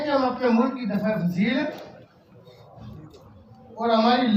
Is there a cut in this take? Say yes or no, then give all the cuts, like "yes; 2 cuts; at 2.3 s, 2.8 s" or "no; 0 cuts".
no; 0 cuts